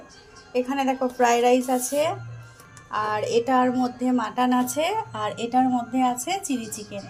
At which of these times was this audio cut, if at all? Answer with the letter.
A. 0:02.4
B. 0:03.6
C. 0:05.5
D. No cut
D